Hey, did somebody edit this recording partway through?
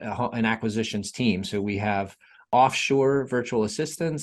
yes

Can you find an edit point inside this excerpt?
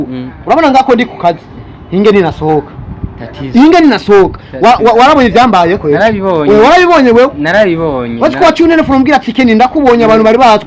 no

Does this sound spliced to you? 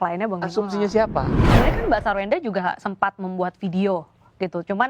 yes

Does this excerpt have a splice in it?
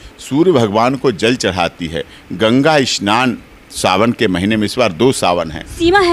no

